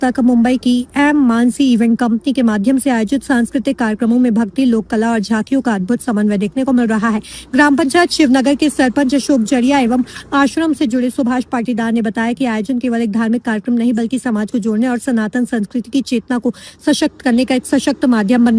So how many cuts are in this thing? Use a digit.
0